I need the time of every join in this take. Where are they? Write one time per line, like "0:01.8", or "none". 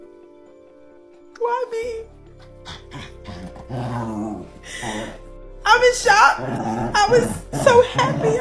0:01.2